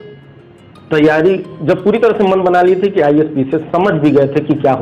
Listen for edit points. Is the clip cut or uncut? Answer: uncut